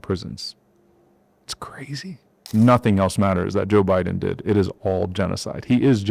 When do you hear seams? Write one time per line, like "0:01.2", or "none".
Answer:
0:02.5